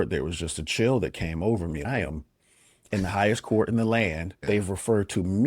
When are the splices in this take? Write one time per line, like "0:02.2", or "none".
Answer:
0:01.8
0:04.3